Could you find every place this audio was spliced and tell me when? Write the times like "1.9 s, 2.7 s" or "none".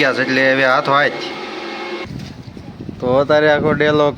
2.1 s